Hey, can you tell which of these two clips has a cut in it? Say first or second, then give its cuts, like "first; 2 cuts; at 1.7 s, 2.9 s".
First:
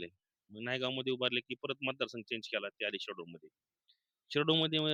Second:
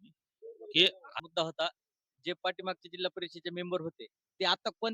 second; 1 cut; at 1.2 s